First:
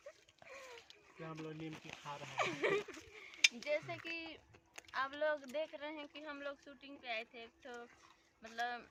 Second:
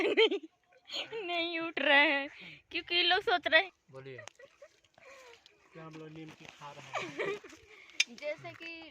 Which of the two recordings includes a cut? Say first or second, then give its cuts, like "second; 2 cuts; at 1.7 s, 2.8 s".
second; 1 cut; at 3.6 s